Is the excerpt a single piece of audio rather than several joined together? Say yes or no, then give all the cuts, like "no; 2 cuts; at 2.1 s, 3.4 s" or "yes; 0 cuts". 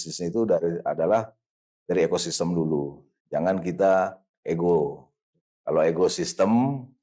yes; 0 cuts